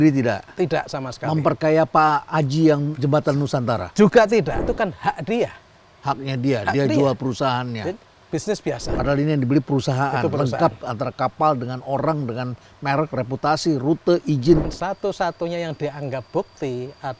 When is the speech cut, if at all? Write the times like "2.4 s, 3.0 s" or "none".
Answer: 4.6 s, 8.9 s, 14.7 s